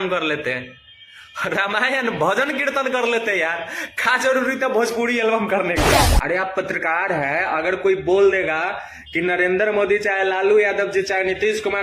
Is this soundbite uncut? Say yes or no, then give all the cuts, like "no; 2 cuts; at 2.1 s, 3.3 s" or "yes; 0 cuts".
no; 1 cut; at 6.1 s